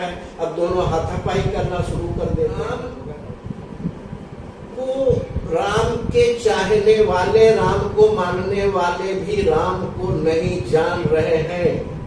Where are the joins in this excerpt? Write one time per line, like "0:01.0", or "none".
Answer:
0:03.0